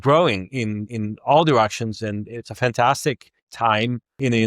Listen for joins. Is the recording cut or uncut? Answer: cut